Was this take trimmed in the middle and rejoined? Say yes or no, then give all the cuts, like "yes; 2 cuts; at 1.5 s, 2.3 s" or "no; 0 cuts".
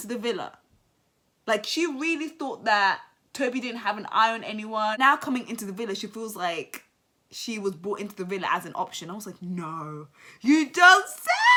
no; 0 cuts